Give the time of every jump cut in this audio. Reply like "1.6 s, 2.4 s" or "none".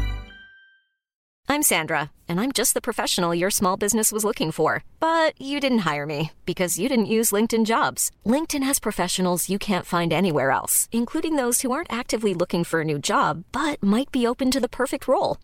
1.3 s